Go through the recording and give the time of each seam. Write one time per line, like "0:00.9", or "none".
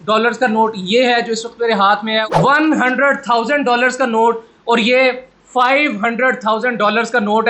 none